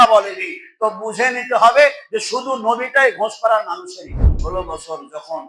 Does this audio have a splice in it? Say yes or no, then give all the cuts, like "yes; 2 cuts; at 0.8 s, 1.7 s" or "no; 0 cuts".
yes; 1 cut; at 4.4 s